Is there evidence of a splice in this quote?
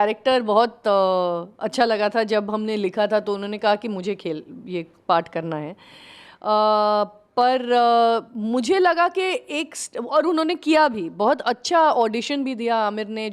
no; 0 cuts

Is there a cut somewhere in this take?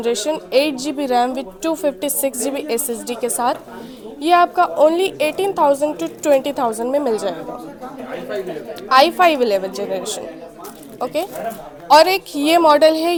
no; 0 cuts

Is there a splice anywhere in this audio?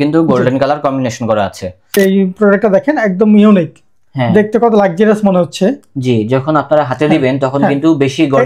yes; 1 cut; at 1.9 s

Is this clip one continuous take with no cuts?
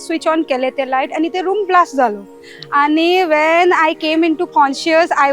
yes; 0 cuts

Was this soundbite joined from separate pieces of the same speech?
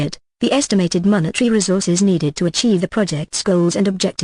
no; 0 cuts

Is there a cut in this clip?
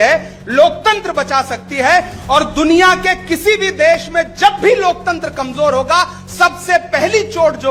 no; 0 cuts

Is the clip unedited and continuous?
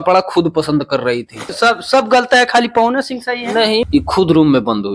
no; 2 cuts; at 1.5 s, 3.8 s

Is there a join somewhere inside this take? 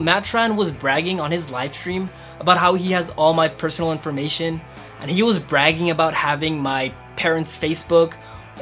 no; 0 cuts

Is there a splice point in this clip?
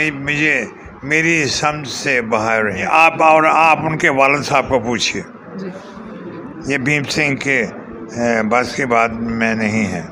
yes; 1 cut; at 2.8 s

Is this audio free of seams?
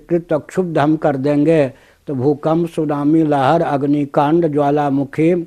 yes; 0 cuts

